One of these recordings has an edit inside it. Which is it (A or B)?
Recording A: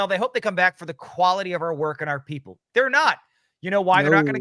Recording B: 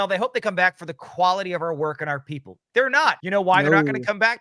B